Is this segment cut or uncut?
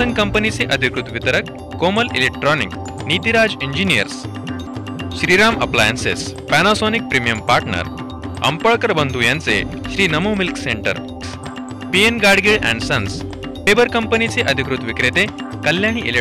uncut